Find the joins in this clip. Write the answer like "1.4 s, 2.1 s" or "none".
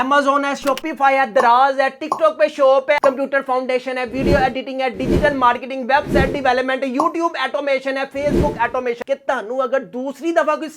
3.0 s, 9.0 s